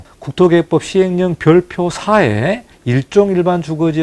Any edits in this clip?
yes; 1 cut; at 2.7 s

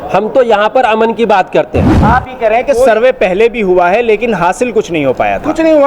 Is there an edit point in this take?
yes; 1 cut; at 2.0 s

